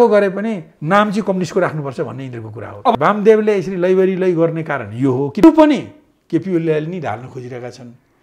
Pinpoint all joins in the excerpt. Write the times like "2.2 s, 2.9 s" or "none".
2.9 s, 5.4 s